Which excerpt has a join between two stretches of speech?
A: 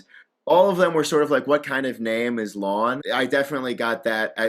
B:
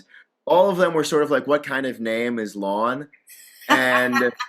A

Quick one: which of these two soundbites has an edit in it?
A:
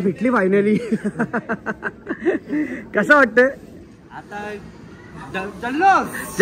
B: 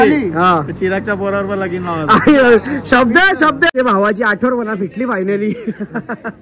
B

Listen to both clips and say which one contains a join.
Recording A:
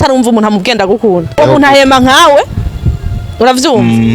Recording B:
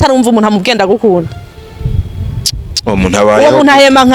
A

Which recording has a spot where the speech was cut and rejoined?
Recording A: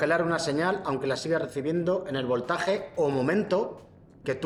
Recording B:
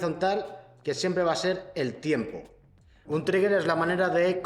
B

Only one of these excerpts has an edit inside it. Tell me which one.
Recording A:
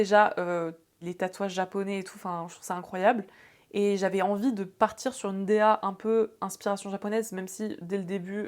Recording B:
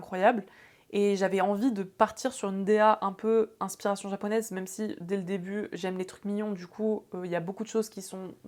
A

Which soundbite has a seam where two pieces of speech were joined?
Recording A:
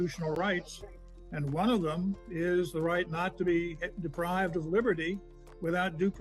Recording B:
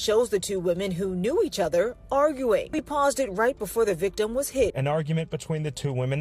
B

